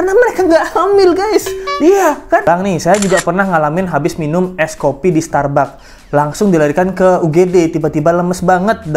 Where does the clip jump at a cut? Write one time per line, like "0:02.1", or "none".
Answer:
0:02.4